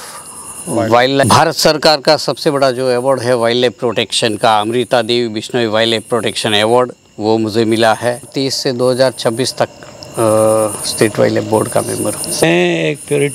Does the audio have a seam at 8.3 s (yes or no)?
yes